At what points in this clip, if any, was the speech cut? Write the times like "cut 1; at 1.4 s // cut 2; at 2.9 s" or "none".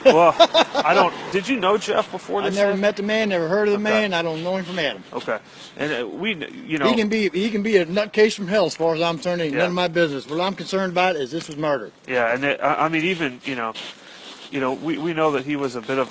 cut 1; at 1.3 s